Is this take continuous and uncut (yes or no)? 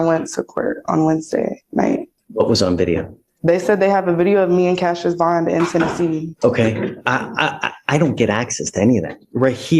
no